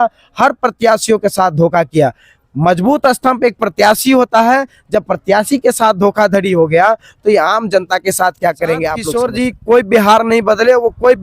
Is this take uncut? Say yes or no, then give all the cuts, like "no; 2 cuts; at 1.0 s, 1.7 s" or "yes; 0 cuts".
no; 1 cut; at 9.0 s